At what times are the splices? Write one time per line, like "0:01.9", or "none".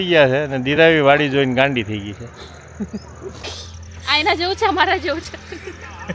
0:03.4